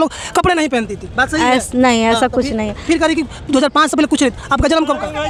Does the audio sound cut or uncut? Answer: uncut